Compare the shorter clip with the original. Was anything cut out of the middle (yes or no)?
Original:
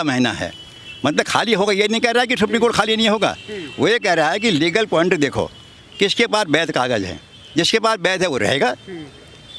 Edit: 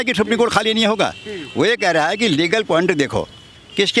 no